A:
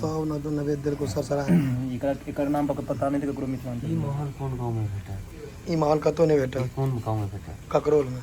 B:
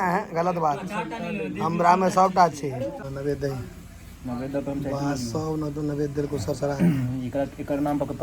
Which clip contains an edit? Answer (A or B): B